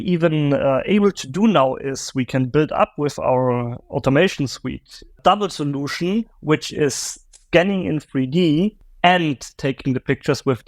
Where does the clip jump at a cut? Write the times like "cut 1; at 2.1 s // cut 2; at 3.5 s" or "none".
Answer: cut 1; at 5.1 s // cut 2; at 8.8 s